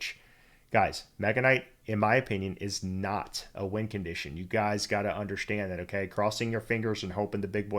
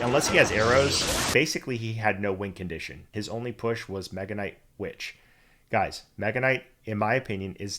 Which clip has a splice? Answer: second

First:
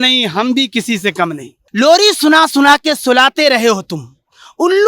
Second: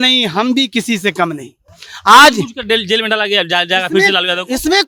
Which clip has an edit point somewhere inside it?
first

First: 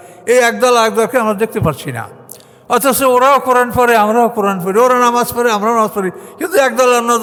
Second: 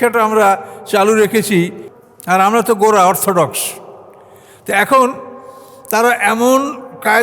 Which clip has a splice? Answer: second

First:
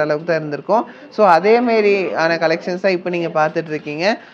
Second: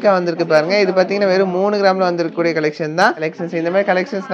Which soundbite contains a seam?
second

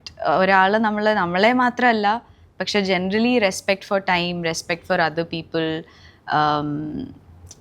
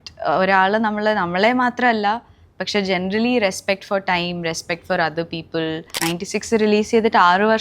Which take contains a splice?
second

